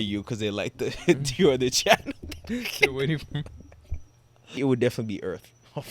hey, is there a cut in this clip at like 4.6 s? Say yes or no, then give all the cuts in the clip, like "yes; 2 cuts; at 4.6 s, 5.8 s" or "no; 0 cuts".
yes; 1 cut; at 4.6 s